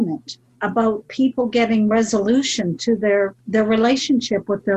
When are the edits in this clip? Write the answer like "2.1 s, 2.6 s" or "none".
3.4 s